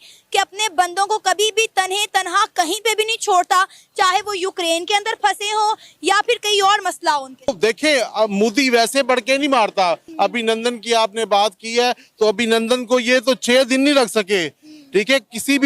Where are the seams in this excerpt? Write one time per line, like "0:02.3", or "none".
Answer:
0:07.5
0:10.0